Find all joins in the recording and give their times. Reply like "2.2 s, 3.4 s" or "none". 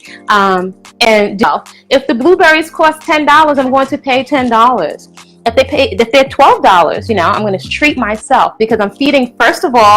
1.4 s, 7.7 s